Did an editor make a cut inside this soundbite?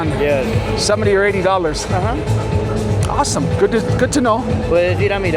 no; 0 cuts

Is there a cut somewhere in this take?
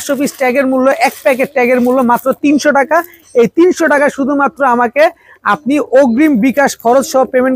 no; 0 cuts

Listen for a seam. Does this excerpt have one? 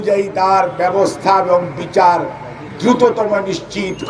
no; 0 cuts

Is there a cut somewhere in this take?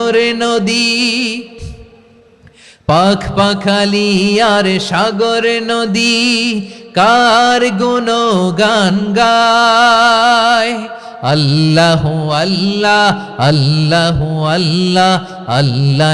no; 0 cuts

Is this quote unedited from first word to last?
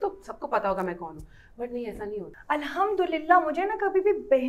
no; 1 cut; at 2.3 s

